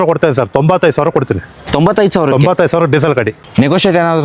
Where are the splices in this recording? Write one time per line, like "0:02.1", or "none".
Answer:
0:03.3